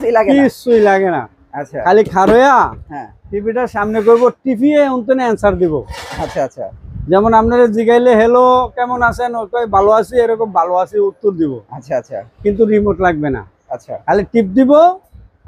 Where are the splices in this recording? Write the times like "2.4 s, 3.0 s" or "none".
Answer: none